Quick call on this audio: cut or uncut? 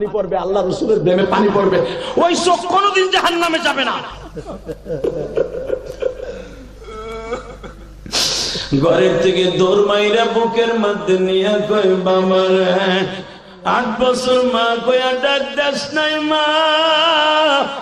cut